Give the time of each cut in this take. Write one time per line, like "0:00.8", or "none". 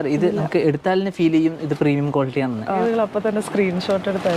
0:02.8